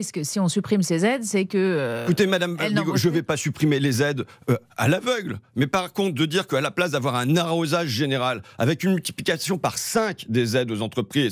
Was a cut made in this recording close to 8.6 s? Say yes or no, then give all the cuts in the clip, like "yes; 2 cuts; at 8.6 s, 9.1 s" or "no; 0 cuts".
no; 0 cuts